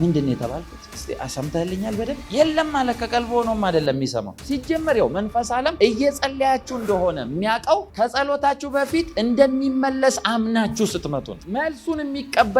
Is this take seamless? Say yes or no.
no